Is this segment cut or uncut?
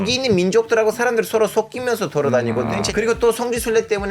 cut